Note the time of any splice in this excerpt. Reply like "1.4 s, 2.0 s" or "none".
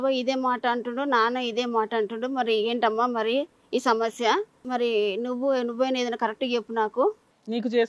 none